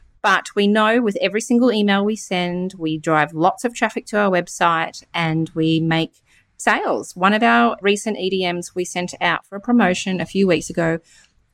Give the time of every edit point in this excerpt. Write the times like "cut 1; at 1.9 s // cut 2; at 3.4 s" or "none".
none

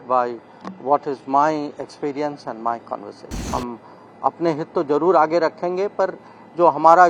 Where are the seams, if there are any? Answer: cut 1; at 3.4 s

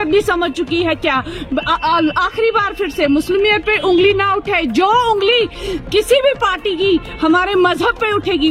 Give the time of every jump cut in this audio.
none

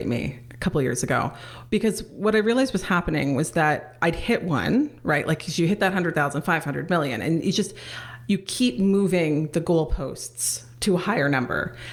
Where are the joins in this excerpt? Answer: none

